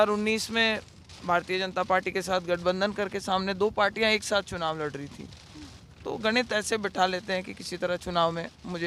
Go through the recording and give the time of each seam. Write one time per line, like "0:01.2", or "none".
none